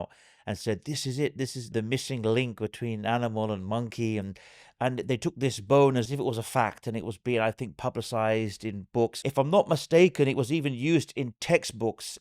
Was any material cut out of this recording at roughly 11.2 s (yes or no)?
no